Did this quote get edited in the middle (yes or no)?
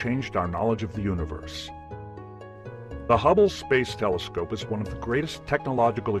yes